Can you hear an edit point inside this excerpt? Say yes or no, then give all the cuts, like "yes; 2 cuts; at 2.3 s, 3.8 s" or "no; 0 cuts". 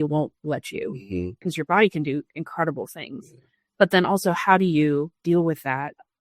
yes; 2 cuts; at 1.4 s, 5.1 s